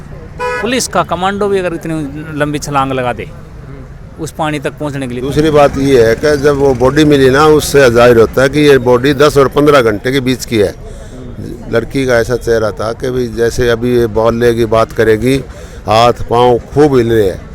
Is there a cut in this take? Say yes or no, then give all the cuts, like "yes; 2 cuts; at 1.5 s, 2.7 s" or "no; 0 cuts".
yes; 1 cut; at 5.1 s